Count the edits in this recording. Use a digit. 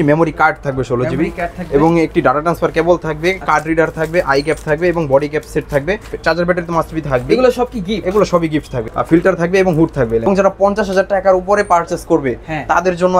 3